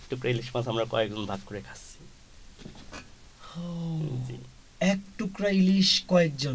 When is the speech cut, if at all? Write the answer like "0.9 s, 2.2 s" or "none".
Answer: none